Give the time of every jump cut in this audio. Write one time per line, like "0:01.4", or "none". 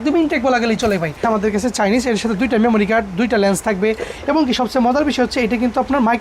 0:01.2

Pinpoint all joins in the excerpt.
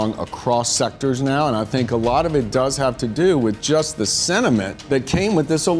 0:04.8

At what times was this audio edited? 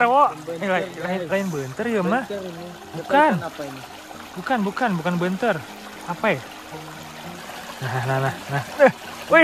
0:07.4

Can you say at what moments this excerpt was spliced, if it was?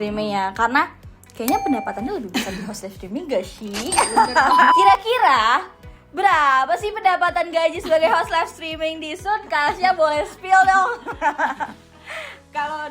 0:04.7

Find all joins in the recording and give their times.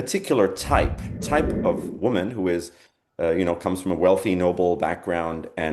0:01.1

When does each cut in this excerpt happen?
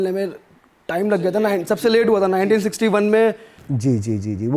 none

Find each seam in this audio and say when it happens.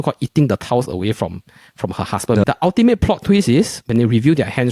0:02.4
0:03.8

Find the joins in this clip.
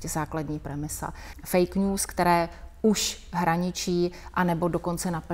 0:01.3

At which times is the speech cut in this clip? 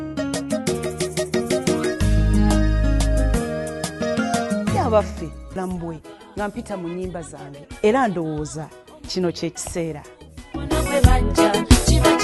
0:05.6

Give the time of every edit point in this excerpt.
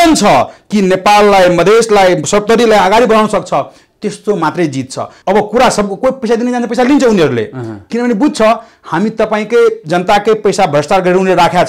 0:05.1

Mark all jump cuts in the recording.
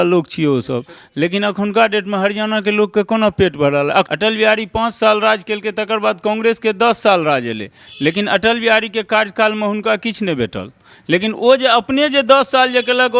0:04.1

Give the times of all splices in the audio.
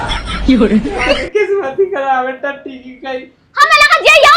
0:01.2

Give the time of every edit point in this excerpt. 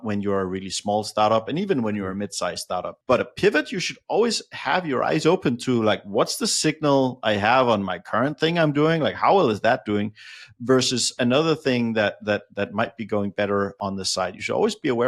none

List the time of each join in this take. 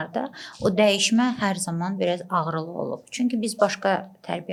none

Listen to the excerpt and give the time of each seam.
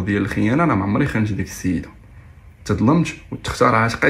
none

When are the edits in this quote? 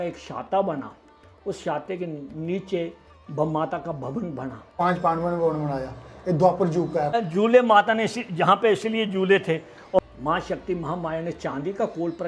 0:04.6
0:07.1
0:10.0

